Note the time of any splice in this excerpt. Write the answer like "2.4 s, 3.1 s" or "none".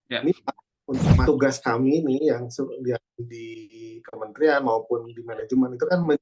1.2 s

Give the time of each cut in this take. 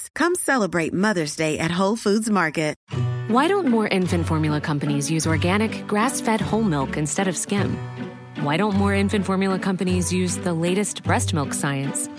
2.8 s

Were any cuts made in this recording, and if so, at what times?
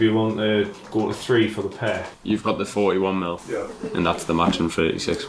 2.1 s

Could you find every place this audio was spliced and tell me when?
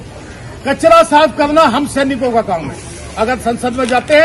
none

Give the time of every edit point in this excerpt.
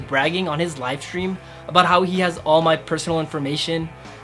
none

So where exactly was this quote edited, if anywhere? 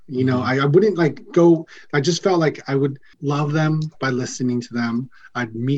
none

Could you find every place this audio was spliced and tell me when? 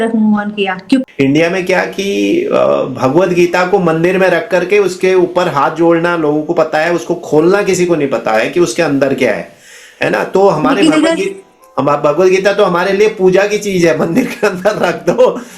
1.0 s

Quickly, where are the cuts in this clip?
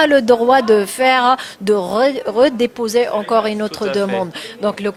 none

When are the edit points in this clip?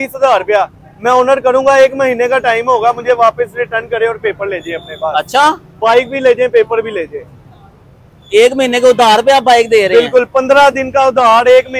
none

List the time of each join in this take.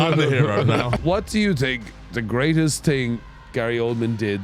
1.0 s

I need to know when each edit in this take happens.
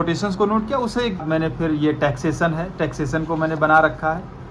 1.2 s

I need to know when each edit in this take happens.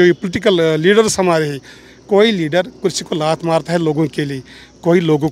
none

